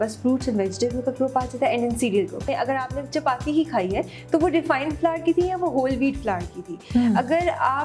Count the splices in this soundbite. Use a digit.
1